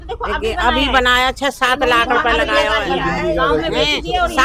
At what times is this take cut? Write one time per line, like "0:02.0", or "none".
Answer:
none